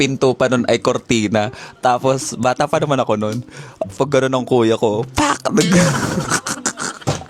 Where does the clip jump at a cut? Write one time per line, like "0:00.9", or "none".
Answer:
none